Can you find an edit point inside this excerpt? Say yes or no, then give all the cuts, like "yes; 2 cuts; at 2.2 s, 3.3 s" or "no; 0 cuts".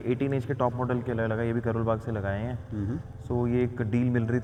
no; 0 cuts